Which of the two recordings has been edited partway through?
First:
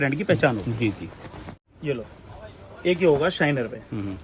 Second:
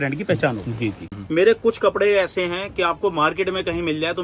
second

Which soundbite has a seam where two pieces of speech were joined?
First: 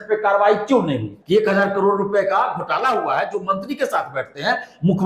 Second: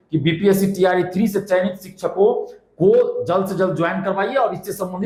first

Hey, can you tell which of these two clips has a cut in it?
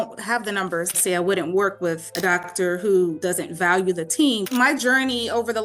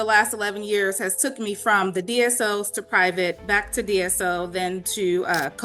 first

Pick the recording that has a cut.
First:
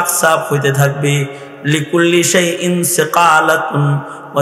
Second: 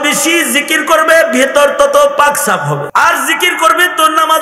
second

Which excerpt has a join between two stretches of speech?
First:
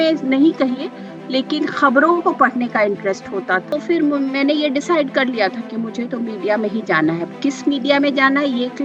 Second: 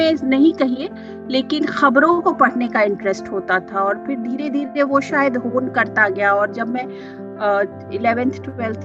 first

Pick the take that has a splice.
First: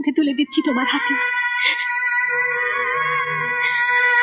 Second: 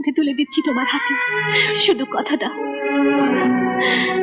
second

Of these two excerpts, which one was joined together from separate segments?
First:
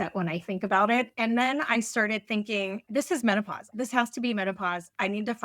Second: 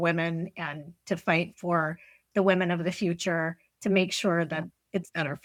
first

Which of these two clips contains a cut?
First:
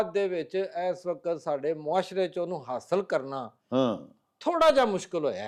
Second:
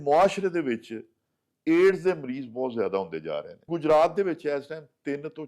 second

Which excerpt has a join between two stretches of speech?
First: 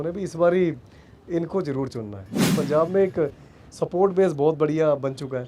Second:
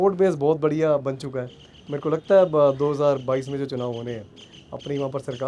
first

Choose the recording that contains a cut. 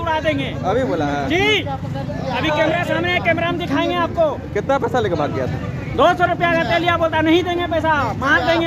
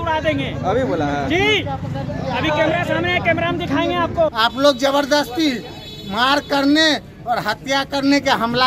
second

